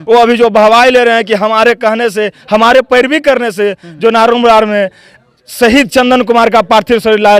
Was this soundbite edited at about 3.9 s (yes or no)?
no